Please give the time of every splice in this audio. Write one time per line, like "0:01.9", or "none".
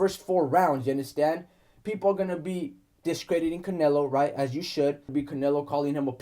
0:05.1